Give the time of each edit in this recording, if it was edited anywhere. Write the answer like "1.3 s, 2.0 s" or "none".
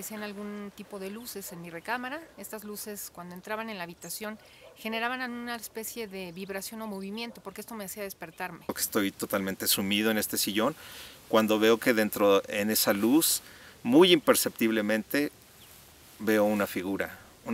8.7 s